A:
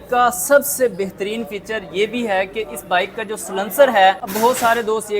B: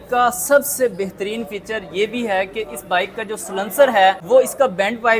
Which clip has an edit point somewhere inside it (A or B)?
A